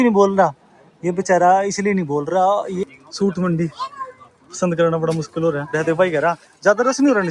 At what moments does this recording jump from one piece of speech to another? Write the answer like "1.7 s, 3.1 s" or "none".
3.0 s, 5.7 s